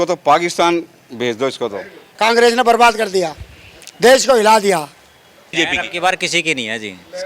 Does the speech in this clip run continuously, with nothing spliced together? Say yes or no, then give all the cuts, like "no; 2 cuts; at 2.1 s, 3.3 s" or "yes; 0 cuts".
no; 2 cuts; at 2.1 s, 5.5 s